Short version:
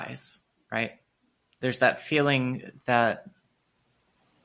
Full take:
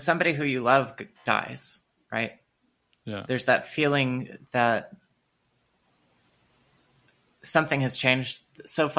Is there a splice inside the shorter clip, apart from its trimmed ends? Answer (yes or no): yes